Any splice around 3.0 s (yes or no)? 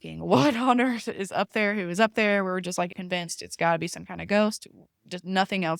yes